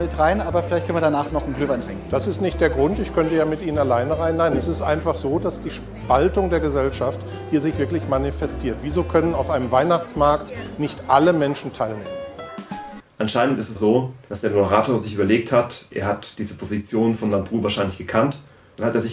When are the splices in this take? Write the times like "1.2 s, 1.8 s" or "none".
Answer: none